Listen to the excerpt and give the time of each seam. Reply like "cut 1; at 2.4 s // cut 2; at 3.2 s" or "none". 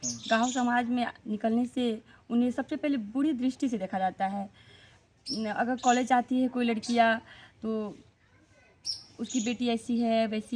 none